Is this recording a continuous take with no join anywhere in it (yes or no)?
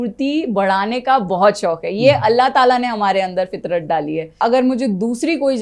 no